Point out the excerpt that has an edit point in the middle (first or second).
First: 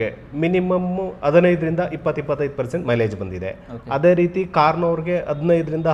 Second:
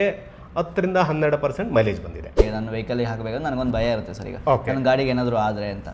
second